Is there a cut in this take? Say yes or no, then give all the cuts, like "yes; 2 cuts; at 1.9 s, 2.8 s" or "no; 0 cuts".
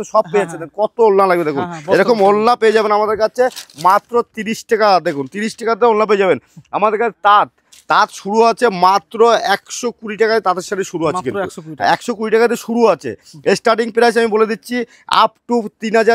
no; 0 cuts